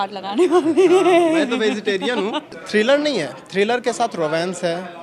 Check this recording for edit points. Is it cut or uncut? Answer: cut